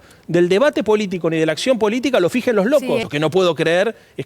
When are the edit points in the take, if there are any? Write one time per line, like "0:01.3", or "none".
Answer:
0:03.1